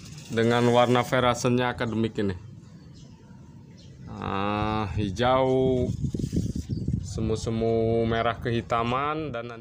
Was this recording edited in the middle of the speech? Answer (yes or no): no